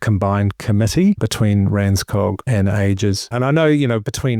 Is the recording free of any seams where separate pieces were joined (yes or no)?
no